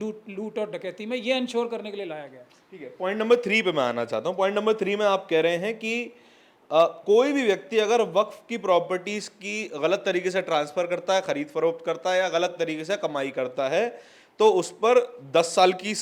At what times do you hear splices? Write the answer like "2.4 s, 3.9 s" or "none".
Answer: none